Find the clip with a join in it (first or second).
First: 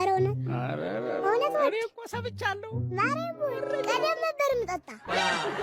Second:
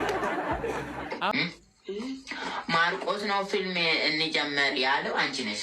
second